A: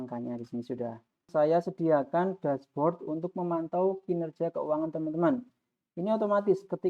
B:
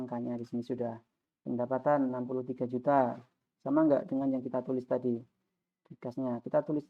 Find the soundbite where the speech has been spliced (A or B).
A